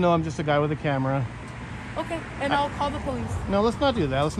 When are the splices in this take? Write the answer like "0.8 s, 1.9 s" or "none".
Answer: none